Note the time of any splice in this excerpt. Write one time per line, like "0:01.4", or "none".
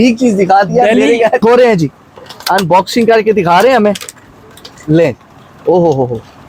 0:01.4